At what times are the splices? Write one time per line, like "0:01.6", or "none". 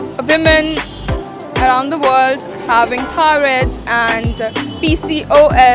none